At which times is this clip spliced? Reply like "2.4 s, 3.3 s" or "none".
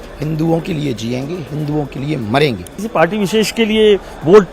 2.8 s

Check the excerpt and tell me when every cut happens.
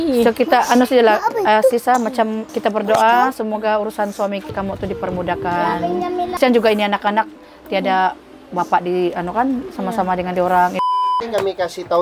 2.5 s, 4.5 s, 6.3 s, 10.8 s

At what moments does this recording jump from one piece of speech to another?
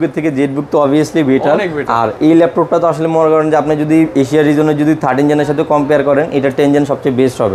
none

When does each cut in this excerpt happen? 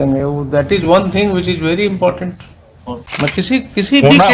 3.0 s

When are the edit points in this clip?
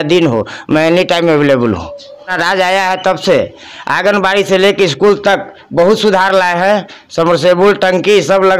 2.3 s

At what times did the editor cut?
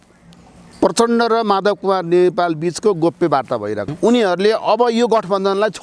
3.9 s

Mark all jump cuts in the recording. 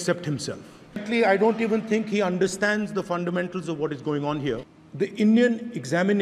1.0 s, 4.6 s

